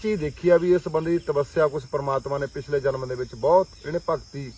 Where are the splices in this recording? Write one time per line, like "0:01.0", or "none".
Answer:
none